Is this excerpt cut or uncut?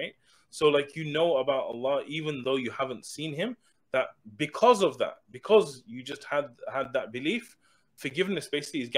cut